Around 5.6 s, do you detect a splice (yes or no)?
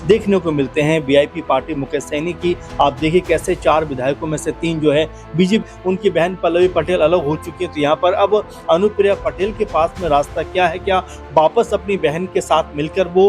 yes